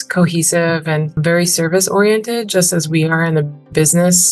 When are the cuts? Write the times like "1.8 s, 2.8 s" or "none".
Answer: 1.2 s